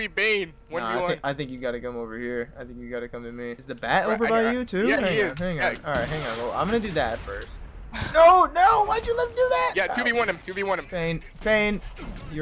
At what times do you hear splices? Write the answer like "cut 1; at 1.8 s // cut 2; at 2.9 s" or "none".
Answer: cut 1; at 3.6 s